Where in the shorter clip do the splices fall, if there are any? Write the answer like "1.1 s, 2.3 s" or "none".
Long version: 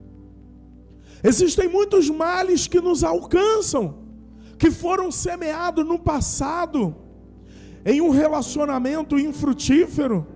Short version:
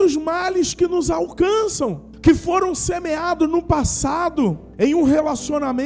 2.1 s, 4.6 s